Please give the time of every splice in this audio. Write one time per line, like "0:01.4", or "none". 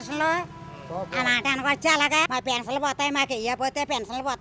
0:02.3